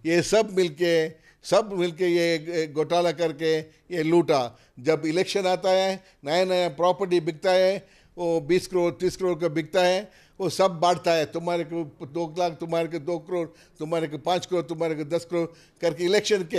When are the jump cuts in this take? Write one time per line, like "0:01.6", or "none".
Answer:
none